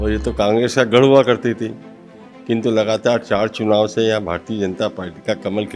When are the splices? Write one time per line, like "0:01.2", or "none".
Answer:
none